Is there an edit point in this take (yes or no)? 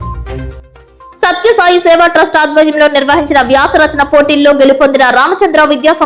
no